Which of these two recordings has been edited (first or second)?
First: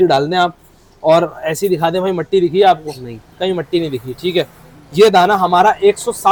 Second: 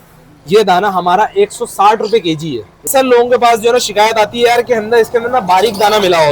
second